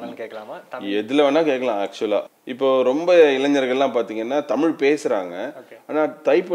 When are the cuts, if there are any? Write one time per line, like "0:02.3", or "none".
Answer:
0:02.4